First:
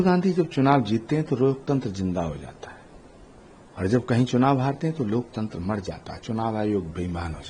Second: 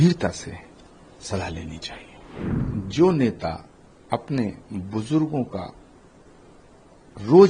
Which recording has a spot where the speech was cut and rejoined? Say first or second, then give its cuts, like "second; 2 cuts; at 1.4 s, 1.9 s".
second; 1 cut; at 2.6 s